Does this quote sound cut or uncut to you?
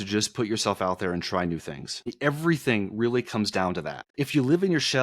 cut